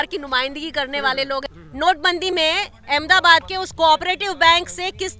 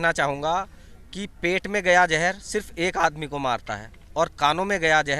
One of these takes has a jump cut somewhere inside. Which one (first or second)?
first